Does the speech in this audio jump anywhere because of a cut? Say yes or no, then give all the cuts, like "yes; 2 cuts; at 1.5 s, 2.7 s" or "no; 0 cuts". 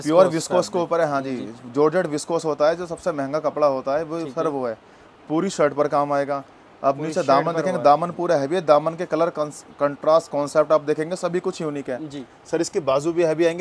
no; 0 cuts